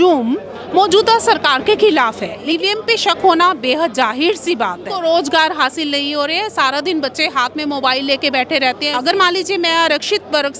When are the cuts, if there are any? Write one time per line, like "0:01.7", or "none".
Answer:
0:02.4
0:04.9
0:08.9